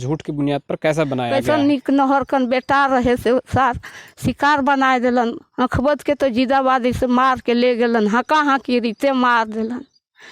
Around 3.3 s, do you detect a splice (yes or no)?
no